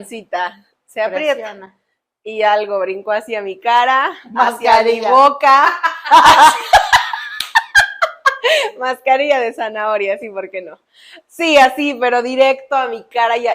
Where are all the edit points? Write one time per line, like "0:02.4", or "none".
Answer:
none

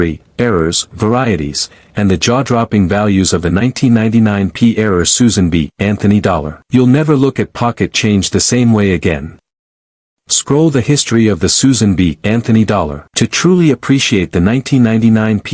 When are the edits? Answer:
0:06.5
0:13.0

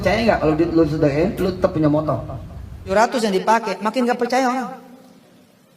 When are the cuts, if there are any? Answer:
0:02.9

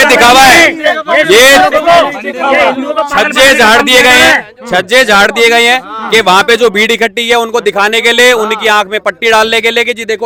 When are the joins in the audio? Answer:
none

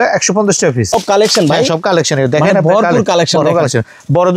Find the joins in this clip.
0:00.9

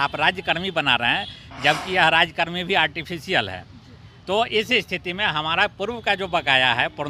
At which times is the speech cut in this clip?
none

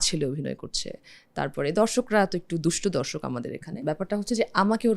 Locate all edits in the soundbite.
0:03.7

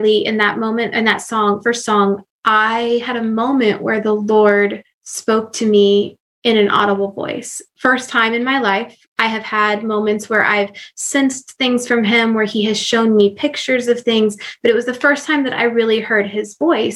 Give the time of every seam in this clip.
0:02.3

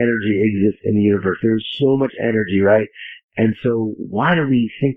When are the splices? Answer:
none

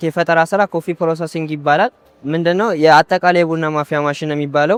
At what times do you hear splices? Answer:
none

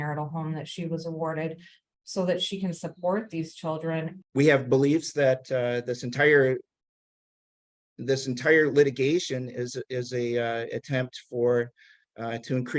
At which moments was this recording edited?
0:04.2

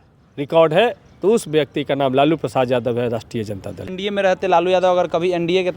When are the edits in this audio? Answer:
0:04.2

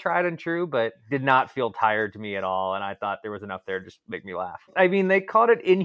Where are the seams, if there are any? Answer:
0:01.0
0:04.7

